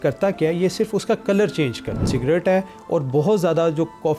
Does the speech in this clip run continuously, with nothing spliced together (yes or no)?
no